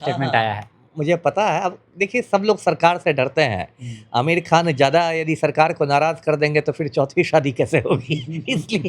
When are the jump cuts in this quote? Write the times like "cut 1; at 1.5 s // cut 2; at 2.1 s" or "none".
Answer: none